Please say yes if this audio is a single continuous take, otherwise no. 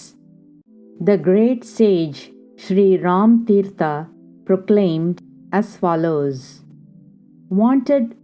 yes